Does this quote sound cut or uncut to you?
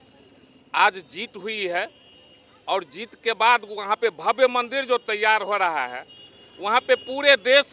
uncut